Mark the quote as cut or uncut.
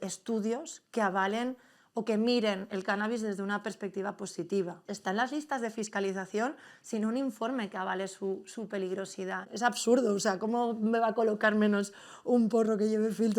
cut